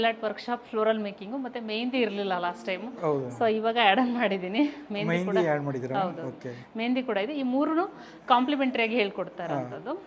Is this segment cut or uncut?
uncut